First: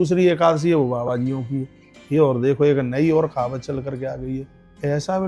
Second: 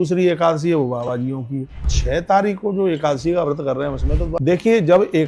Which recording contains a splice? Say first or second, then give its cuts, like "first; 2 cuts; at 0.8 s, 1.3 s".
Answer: second; 2 cuts; at 1.9 s, 4.3 s